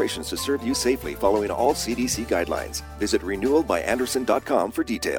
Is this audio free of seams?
yes; 0 cuts

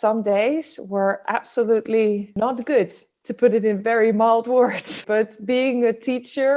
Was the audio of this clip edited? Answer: yes; 2 cuts; at 2.3 s, 5.0 s

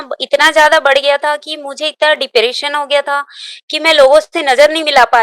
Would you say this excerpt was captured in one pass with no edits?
yes; 0 cuts

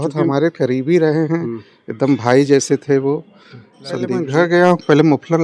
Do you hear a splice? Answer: yes; 1 cut; at 4.2 s

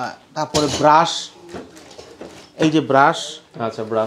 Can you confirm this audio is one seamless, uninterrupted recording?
yes; 0 cuts

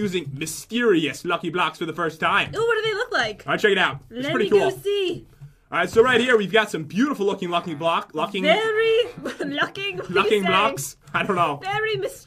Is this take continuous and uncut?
no; 1 cut; at 9.4 s

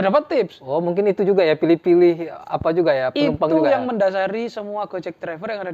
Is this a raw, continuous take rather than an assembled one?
yes; 0 cuts

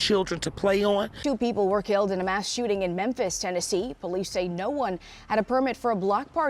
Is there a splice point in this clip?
yes; 1 cut; at 1.1 s

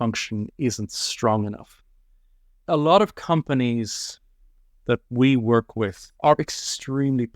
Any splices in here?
yes; 1 cut; at 6.4 s

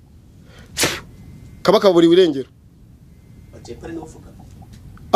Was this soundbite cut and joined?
no; 0 cuts

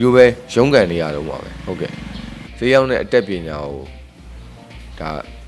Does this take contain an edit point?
yes; 1 cut; at 2.4 s

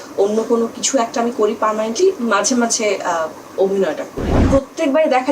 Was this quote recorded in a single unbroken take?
no; 1 cut; at 4.4 s

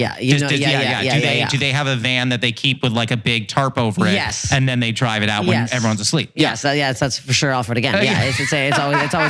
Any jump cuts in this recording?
no; 0 cuts

